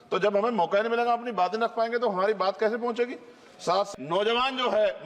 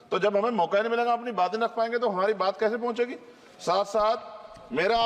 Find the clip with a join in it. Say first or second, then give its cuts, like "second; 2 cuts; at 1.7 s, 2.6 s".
first; 1 cut; at 3.9 s